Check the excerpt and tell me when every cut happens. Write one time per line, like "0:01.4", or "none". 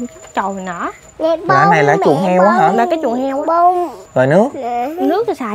0:01.0
0:04.0